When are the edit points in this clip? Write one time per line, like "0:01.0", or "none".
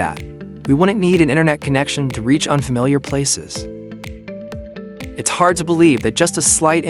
0:03.3
0:05.2